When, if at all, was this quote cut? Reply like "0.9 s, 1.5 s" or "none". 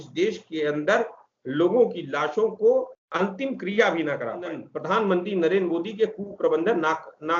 3.0 s, 4.7 s